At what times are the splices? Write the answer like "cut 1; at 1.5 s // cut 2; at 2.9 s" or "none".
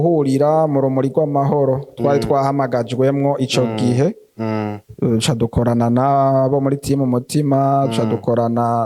none